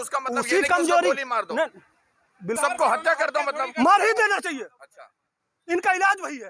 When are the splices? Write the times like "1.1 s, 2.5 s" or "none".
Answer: 2.6 s